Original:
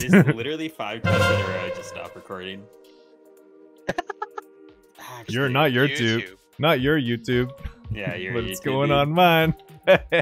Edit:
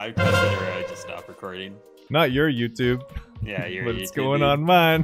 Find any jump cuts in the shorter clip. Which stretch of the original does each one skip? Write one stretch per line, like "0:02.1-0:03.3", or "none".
0:02.8-0:06.4